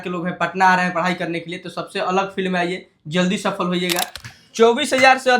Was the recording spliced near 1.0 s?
no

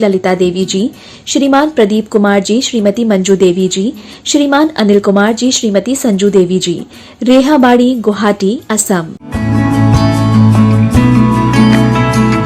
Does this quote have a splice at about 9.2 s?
yes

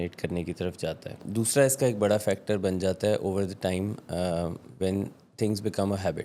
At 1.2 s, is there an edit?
yes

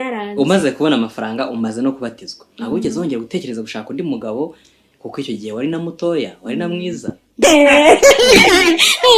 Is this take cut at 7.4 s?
yes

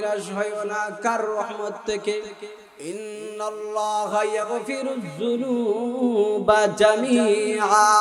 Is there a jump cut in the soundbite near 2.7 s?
yes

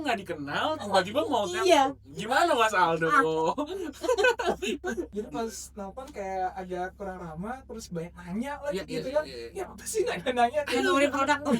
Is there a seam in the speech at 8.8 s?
no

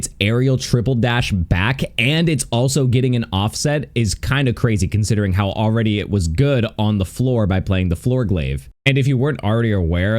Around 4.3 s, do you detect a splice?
no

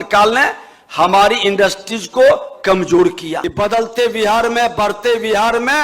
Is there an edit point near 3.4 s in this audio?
yes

